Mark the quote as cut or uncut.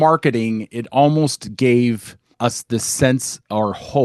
cut